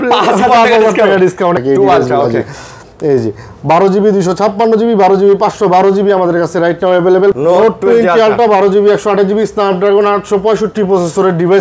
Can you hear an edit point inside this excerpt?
yes; 2 cuts; at 1.6 s, 7.4 s

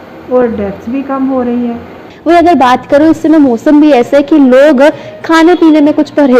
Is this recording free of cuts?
no; 1 cut; at 2.1 s

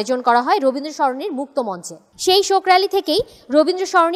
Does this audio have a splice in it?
no; 0 cuts

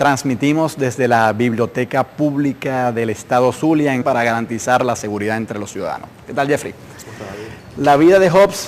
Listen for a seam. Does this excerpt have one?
no; 0 cuts

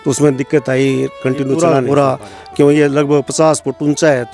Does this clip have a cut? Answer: yes; 1 cut; at 1.6 s

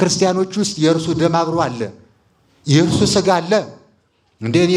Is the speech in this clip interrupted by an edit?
no; 0 cuts

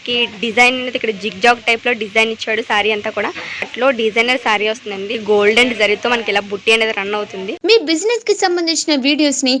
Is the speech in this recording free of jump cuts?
no; 3 cuts; at 3.7 s, 5.1 s, 7.5 s

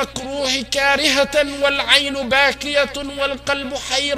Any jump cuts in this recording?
no; 0 cuts

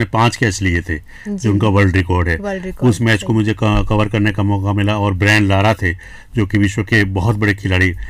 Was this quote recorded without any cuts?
yes; 0 cuts

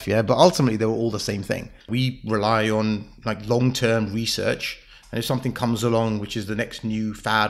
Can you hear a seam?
yes; 1 cut; at 1.9 s

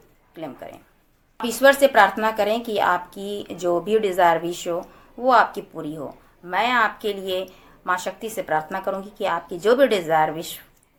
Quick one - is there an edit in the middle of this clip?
no; 0 cuts

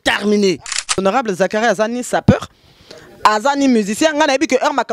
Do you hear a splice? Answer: yes; 1 cut; at 1.0 s

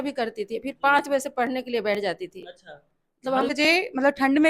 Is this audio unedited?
no; 1 cut; at 3.5 s

